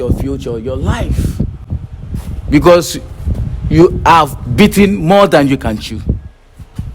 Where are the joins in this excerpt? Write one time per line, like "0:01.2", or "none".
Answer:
none